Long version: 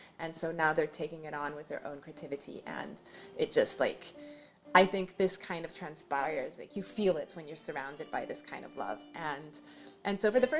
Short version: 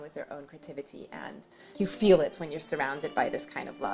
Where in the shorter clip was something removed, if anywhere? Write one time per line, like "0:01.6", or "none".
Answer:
0:01.6